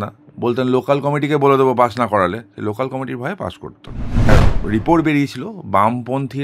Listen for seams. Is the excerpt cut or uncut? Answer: cut